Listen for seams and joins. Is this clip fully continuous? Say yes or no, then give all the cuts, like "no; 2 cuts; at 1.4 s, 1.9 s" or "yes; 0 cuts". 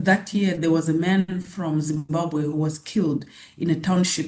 yes; 0 cuts